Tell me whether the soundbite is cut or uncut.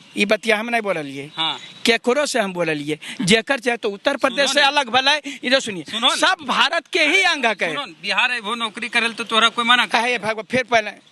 uncut